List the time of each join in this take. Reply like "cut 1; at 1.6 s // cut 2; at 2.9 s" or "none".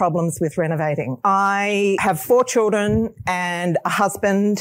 cut 1; at 1.1 s // cut 2; at 2.0 s